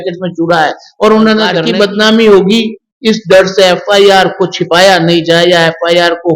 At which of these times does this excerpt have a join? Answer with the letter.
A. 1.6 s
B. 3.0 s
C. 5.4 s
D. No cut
A